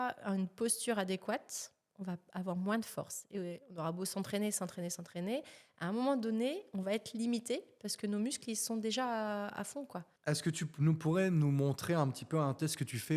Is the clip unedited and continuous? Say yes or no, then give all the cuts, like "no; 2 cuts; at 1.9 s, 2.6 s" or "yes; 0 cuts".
no; 1 cut; at 10.1 s